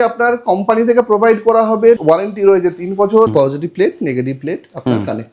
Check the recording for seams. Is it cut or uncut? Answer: cut